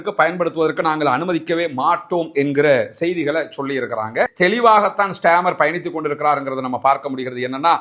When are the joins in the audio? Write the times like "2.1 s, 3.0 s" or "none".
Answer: 4.3 s